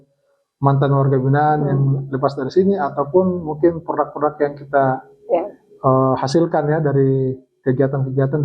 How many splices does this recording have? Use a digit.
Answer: 0